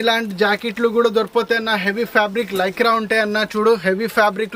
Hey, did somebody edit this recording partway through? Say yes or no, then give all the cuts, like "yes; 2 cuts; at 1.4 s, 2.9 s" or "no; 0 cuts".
no; 0 cuts